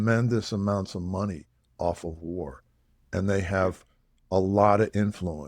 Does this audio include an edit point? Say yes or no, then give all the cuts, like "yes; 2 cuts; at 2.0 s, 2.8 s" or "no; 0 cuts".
no; 0 cuts